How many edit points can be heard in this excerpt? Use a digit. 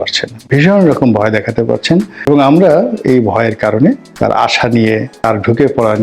3